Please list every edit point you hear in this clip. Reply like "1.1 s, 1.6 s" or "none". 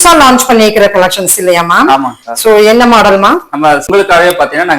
3.9 s